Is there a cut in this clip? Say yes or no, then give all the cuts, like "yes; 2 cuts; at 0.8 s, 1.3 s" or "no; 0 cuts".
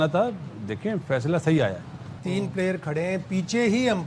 yes; 1 cut; at 2.2 s